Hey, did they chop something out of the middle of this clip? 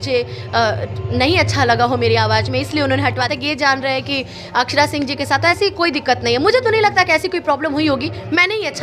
yes; 1 cut; at 3.3 s

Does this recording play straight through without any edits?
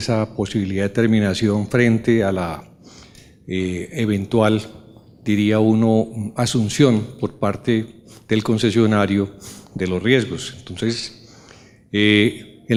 yes; 0 cuts

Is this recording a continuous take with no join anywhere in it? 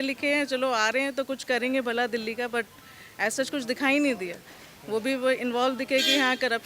yes; 0 cuts

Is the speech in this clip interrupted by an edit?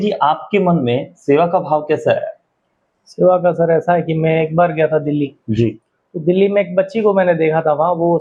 no; 0 cuts

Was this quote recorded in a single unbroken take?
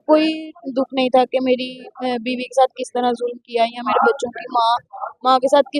yes; 0 cuts

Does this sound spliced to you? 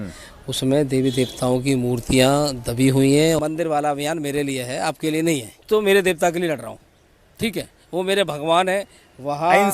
yes; 2 cuts; at 3.4 s, 5.6 s

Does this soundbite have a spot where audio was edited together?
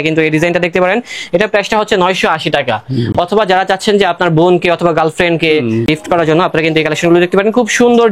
no; 0 cuts

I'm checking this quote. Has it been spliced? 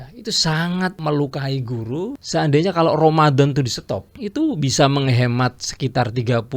yes; 3 cuts; at 1.0 s, 2.2 s, 4.1 s

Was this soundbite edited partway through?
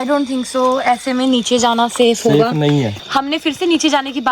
yes; 1 cut; at 2.9 s

